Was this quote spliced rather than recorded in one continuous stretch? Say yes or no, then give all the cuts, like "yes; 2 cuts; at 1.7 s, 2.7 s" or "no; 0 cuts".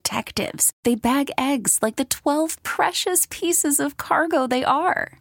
no; 0 cuts